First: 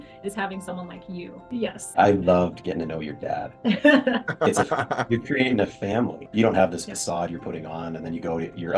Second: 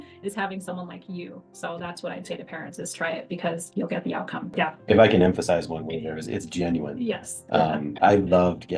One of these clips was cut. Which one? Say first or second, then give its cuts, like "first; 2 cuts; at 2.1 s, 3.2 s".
first; 2 cuts; at 1.8 s, 6.3 s